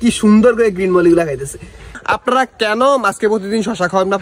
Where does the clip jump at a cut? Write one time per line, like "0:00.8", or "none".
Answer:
0:02.0